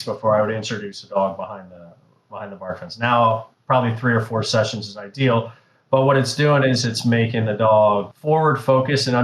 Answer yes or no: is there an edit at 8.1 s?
yes